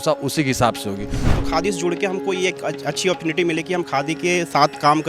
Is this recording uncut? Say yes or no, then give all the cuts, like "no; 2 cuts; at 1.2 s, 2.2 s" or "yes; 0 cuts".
no; 1 cut; at 1.2 s